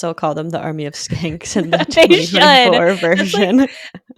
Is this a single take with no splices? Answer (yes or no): yes